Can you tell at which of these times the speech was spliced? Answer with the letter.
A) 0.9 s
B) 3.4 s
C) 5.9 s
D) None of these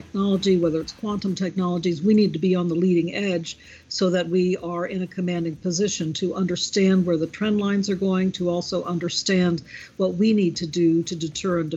D